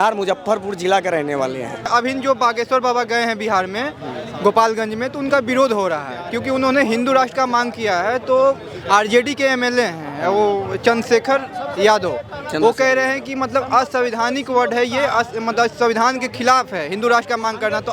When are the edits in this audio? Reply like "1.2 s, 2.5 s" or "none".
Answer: 1.9 s